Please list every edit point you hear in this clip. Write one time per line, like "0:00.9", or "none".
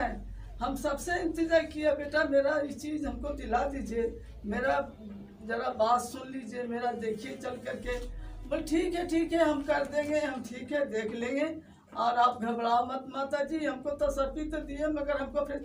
none